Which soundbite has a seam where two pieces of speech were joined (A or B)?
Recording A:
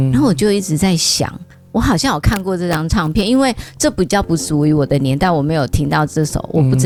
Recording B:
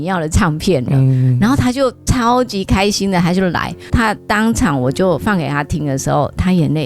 B